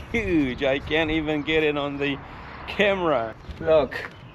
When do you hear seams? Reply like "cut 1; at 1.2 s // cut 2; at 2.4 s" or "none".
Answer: cut 1; at 3.4 s